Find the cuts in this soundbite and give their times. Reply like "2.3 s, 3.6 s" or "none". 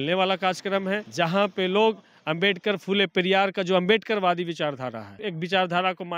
1.1 s, 5.3 s